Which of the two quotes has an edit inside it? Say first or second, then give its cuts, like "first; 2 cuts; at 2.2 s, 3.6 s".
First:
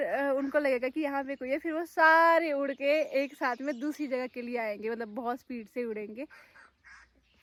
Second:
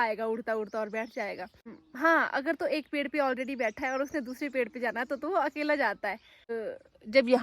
second; 2 cuts; at 1.8 s, 6.5 s